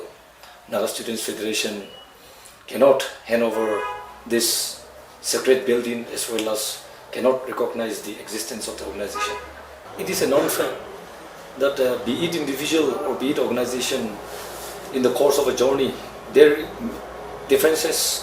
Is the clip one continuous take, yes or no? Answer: no